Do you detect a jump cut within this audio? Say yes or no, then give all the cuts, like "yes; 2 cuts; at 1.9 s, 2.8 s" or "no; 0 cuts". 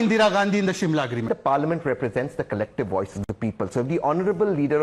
yes; 1 cut; at 1.3 s